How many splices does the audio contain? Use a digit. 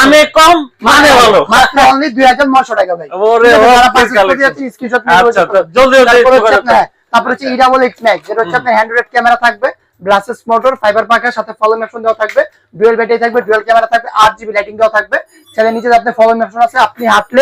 0